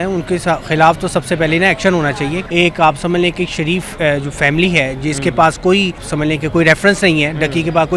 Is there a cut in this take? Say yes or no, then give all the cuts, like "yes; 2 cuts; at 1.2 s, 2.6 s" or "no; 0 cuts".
yes; 2 cuts; at 2.4 s, 6.1 s